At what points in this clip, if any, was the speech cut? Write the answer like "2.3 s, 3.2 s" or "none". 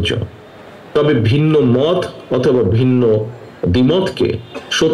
none